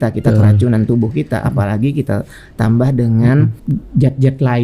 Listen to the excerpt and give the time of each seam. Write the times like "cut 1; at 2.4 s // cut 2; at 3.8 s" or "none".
cut 1; at 3.6 s